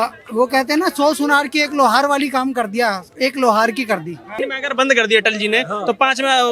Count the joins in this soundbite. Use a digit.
1